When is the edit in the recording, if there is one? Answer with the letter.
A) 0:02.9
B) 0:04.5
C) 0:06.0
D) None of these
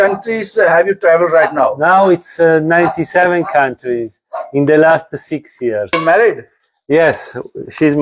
C